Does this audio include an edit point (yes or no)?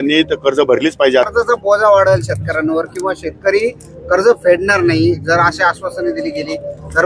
yes